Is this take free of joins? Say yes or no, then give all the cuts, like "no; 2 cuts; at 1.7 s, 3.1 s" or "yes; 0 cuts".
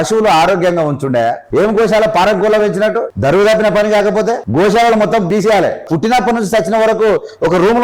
no; 4 cuts; at 1.4 s, 3.1 s, 4.4 s, 5.4 s